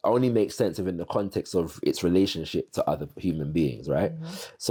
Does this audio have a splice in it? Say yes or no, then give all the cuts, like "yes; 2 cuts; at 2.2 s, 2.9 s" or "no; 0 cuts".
no; 0 cuts